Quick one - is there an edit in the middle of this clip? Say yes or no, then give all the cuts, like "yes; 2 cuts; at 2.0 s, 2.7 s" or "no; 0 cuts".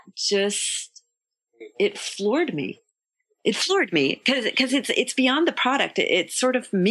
yes; 1 cut; at 3.2 s